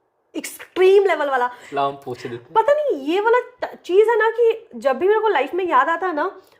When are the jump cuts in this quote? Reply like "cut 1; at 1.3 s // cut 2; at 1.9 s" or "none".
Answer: cut 1; at 1.6 s